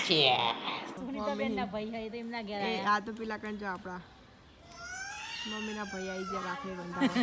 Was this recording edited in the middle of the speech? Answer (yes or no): yes